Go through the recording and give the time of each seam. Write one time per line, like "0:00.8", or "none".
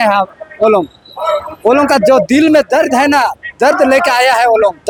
none